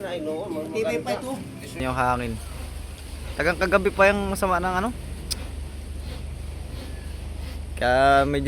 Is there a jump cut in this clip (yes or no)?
yes